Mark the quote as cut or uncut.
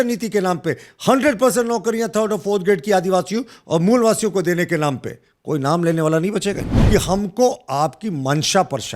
cut